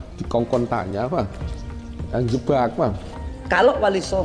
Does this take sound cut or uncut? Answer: cut